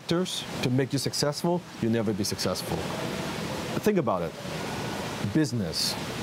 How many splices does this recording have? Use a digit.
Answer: 0